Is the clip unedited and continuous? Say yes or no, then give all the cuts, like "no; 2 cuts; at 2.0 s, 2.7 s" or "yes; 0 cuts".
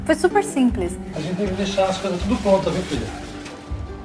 yes; 0 cuts